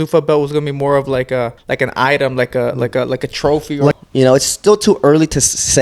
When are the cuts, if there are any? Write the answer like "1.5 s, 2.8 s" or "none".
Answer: 1.6 s, 3.9 s